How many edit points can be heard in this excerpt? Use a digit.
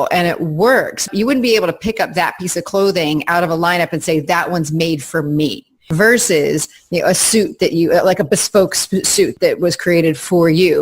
3